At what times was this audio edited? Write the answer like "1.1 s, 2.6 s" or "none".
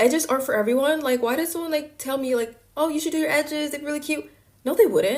none